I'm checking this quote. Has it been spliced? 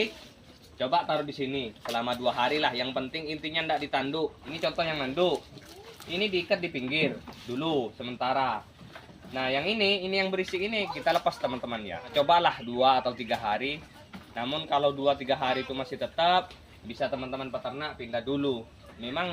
yes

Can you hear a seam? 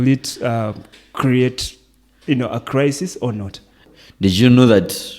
yes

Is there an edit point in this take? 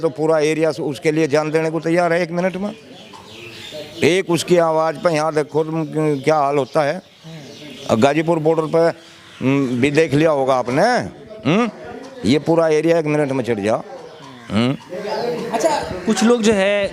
no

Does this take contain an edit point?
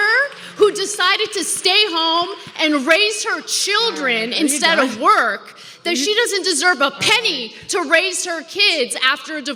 no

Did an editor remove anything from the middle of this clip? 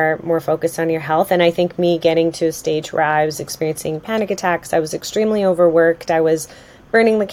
no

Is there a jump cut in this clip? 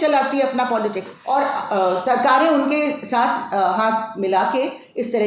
yes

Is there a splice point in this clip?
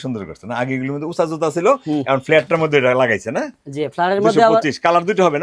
no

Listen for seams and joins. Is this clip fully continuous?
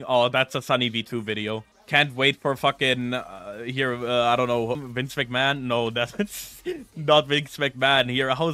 no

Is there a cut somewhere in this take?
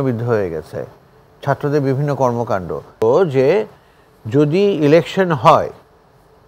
yes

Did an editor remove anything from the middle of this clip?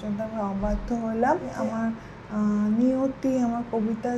yes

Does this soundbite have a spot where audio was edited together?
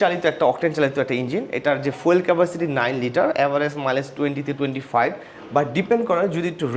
no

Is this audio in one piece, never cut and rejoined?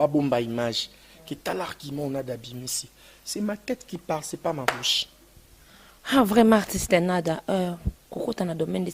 yes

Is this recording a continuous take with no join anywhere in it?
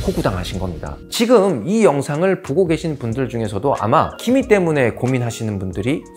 no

